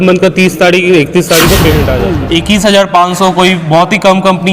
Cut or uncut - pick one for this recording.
cut